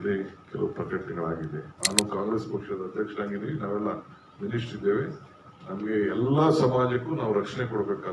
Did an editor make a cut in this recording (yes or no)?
yes